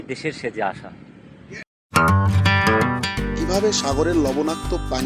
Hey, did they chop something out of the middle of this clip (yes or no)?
no